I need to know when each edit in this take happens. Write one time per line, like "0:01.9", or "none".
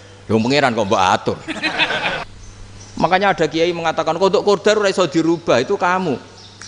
0:02.2